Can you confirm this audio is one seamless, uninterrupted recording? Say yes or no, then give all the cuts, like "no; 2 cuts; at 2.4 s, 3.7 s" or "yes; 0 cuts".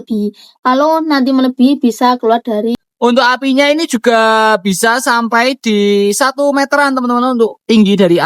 no; 1 cut; at 2.7 s